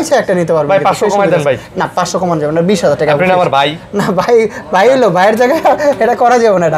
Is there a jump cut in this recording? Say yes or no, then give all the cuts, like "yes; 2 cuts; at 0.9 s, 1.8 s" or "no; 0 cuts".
no; 0 cuts